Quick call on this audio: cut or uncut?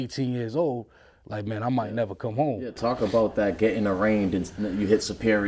uncut